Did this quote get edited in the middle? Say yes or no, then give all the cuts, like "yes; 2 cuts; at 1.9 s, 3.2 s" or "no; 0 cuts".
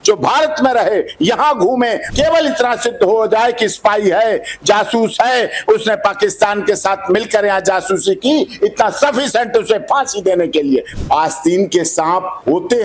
yes; 2 cuts; at 2.0 s, 10.9 s